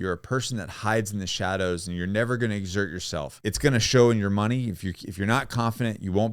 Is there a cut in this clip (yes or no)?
yes